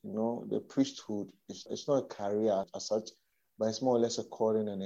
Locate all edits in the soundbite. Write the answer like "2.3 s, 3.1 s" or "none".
1.7 s, 2.8 s